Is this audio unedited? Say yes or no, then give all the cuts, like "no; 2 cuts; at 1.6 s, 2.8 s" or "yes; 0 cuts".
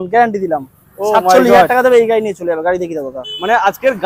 yes; 0 cuts